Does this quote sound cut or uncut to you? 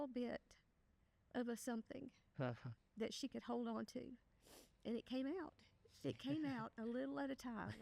uncut